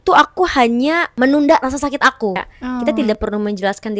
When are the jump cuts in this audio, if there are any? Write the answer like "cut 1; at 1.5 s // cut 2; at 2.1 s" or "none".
cut 1; at 1.1 s // cut 2; at 2.8 s